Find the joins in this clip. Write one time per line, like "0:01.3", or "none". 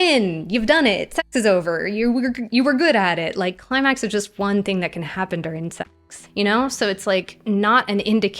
0:05.8
0:07.3